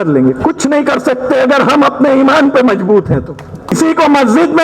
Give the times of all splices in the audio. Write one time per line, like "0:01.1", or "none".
0:03.7